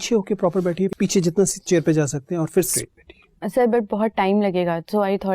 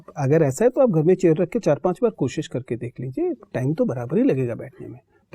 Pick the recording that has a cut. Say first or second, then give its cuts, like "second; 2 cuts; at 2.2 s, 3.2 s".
first; 2 cuts; at 0.9 s, 2.7 s